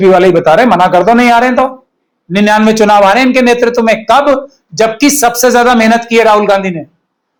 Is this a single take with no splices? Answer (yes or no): yes